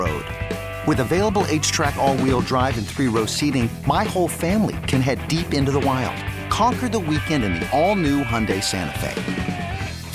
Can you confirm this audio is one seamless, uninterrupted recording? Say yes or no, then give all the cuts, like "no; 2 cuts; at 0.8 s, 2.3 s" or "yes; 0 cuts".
yes; 0 cuts